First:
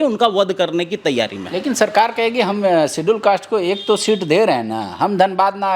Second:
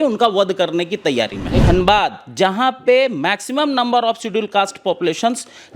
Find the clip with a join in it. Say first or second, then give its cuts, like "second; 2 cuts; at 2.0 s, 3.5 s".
second; 1 cut; at 1.5 s